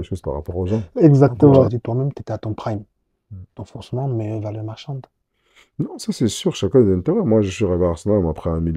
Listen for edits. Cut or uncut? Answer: cut